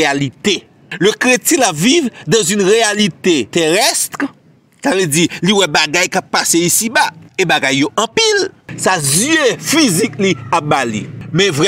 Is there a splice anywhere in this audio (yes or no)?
yes